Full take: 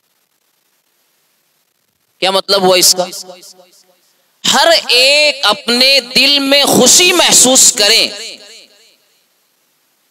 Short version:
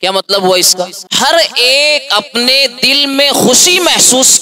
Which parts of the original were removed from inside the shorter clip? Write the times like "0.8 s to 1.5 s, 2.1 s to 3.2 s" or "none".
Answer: 3.2 s to 4.3 s